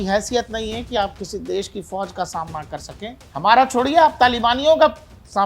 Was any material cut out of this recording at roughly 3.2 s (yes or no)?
yes